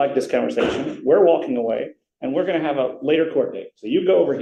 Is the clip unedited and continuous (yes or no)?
yes